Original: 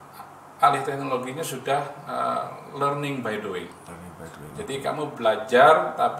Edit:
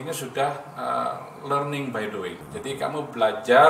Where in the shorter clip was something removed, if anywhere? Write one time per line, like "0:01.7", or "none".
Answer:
0:02.4

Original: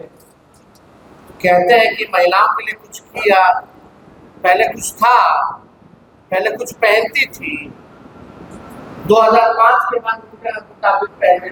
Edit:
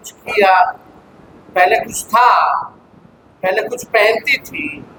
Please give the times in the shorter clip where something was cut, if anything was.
none

